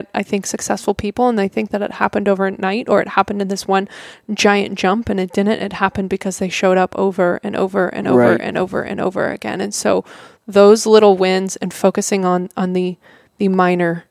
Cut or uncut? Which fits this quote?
uncut